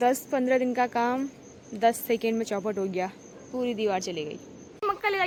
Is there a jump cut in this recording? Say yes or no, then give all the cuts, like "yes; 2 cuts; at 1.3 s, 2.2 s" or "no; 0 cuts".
no; 0 cuts